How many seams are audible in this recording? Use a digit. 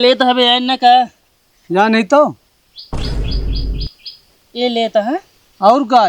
2